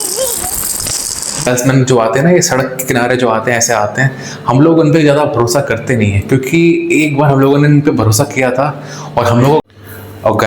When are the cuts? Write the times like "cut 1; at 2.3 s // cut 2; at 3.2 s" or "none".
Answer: cut 1; at 1.4 s // cut 2; at 9.6 s